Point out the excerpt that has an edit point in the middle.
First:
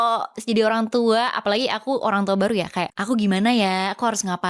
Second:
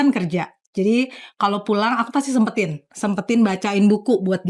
first; 1 cut; at 2.9 s

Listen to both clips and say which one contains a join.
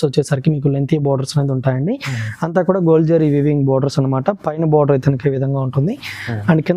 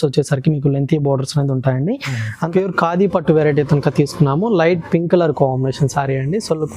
second; 1 cut; at 2.5 s

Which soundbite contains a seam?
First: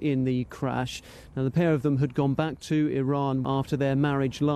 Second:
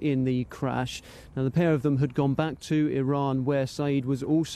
first; 1 cut; at 3.4 s

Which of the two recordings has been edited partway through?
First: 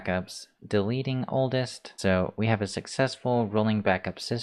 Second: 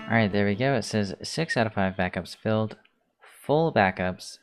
first; 1 cut; at 1.9 s

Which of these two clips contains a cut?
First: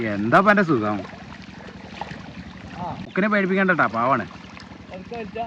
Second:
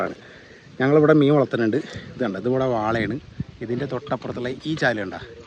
first; 1 cut; at 3.0 s

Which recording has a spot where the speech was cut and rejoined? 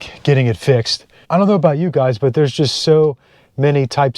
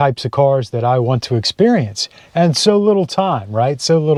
first; 1 cut; at 1.2 s

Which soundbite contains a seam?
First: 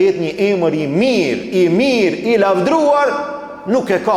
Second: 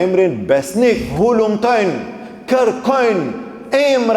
second; 1 cut; at 1.1 s

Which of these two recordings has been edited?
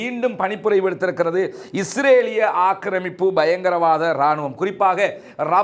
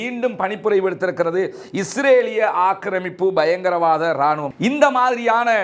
second; 1 cut; at 4.5 s

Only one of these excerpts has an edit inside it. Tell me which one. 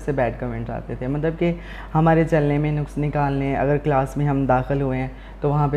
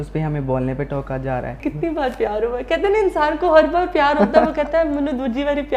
second; 1 cut; at 1.6 s

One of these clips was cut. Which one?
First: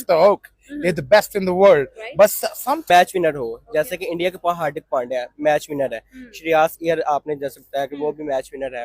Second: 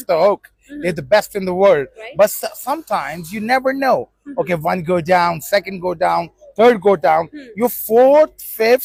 first; 1 cut; at 2.9 s

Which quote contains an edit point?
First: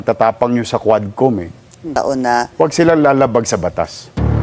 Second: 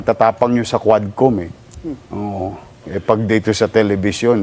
first; 1 cut; at 1.9 s

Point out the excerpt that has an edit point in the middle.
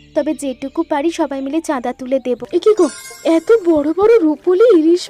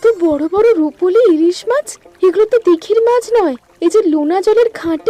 first; 1 cut; at 2.4 s

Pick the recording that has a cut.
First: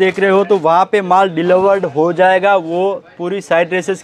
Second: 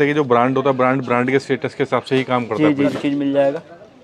second; 1 cut; at 3.0 s

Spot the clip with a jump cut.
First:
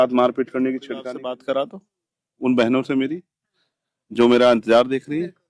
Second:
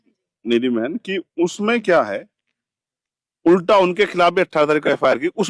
first; 1 cut; at 1.1 s

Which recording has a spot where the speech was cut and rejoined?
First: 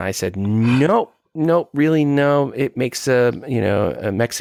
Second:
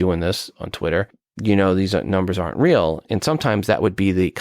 second; 2 cuts; at 1.2 s, 3.0 s

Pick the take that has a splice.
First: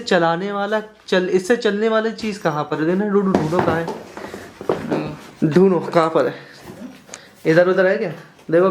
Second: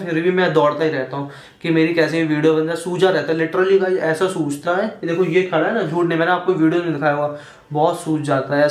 first; 1 cut; at 5.3 s

